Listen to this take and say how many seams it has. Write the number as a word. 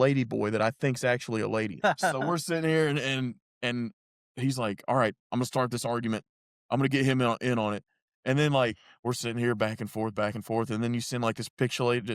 one